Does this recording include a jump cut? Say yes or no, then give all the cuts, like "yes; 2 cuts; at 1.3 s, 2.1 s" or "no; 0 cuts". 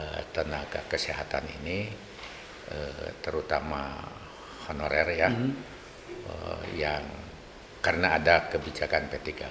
no; 0 cuts